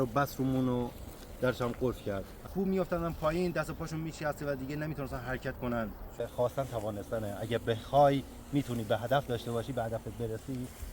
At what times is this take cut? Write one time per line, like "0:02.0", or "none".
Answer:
0:02.5
0:06.2